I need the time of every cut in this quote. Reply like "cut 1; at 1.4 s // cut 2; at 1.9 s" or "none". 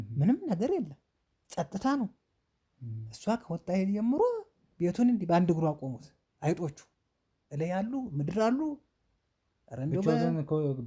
none